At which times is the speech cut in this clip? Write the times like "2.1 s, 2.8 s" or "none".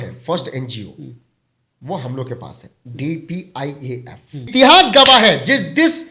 4.5 s